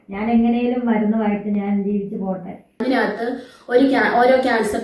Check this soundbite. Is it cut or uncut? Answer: cut